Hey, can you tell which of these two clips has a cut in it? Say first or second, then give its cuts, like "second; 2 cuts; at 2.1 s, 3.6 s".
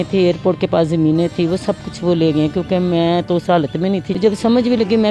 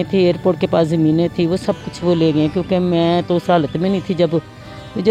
first; 1 cut; at 4.1 s